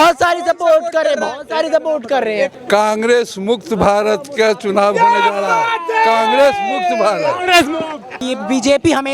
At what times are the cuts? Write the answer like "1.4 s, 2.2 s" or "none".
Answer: 2.5 s, 8.2 s